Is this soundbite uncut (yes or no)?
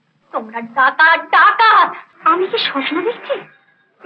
no